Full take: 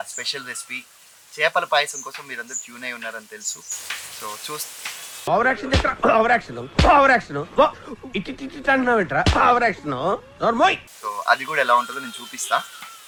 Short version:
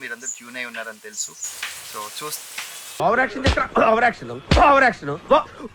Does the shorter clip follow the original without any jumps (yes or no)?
yes